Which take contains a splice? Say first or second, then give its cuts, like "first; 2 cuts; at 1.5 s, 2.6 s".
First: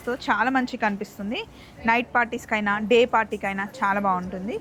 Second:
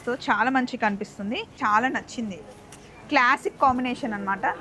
second; 1 cut; at 1.5 s